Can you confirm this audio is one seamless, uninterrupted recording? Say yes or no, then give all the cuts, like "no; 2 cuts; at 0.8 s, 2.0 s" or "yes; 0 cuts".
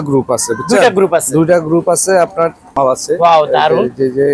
no; 1 cut; at 2.8 s